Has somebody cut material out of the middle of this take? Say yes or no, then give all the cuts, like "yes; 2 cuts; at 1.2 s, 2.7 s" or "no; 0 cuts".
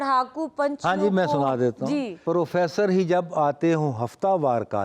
yes; 1 cut; at 2.2 s